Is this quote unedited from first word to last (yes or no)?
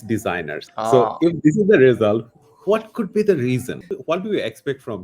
no